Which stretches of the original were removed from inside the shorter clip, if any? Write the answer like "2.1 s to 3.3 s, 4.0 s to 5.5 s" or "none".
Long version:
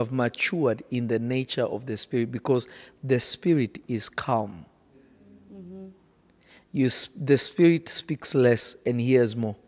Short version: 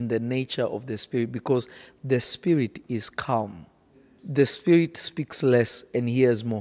5.2 s to 7.1 s